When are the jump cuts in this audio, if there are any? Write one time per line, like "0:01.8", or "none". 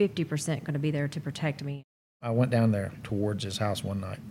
0:02.3